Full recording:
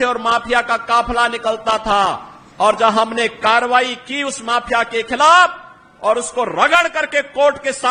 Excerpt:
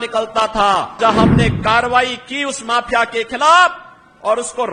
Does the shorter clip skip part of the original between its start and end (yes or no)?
yes